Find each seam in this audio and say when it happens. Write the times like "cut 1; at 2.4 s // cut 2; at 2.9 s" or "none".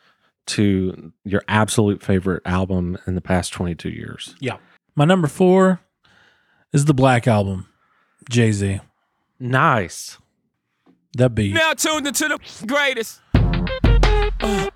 cut 1; at 4.7 s